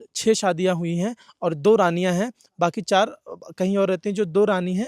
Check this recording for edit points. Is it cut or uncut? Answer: uncut